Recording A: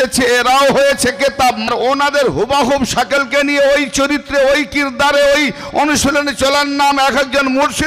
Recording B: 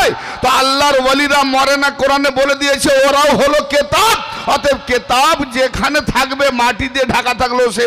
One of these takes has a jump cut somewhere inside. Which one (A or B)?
A